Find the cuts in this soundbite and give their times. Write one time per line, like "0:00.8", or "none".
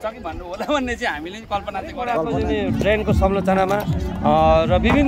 0:02.2